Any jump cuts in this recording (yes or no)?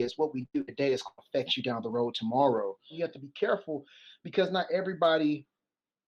yes